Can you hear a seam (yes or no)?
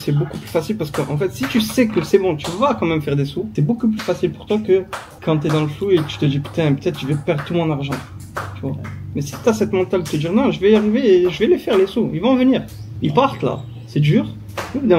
no